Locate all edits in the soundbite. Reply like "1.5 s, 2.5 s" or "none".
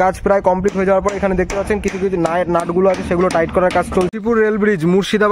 4.1 s

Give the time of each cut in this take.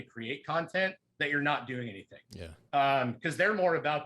2.6 s

